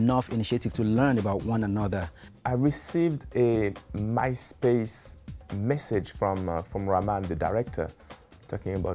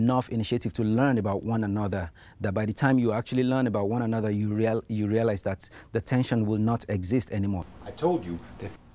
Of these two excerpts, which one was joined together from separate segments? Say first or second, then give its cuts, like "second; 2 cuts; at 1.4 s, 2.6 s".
first; 1 cut; at 2.3 s